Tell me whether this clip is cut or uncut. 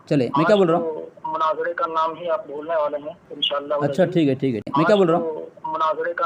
cut